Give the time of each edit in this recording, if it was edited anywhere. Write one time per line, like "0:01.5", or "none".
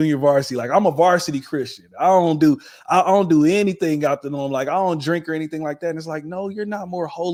none